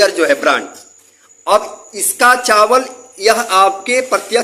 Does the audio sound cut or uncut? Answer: uncut